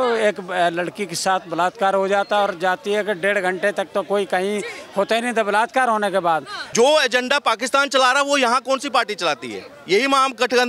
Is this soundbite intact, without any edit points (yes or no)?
no